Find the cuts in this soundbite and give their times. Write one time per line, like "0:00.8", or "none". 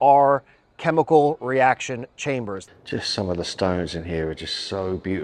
0:02.6